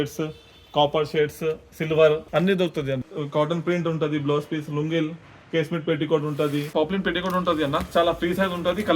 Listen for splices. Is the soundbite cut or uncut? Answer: cut